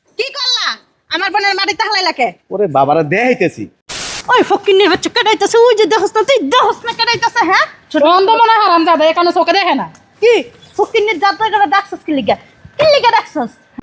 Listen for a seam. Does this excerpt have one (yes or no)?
yes